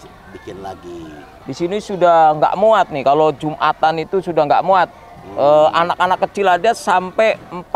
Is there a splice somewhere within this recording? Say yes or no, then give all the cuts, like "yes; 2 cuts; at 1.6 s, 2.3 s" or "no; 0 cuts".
yes; 1 cut; at 1.3 s